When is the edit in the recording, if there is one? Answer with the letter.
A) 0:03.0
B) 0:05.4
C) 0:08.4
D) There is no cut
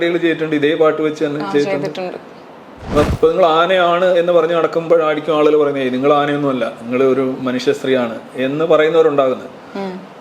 A